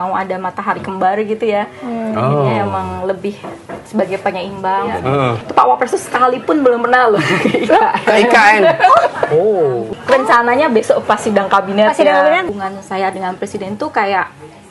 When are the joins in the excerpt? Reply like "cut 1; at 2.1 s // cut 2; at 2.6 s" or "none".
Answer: cut 1; at 5.3 s // cut 2; at 10.0 s // cut 3; at 12.5 s